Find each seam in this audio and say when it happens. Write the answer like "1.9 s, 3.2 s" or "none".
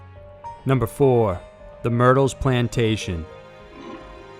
0.9 s